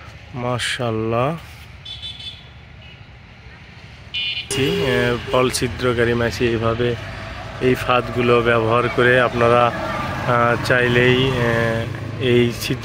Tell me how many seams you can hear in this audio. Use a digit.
1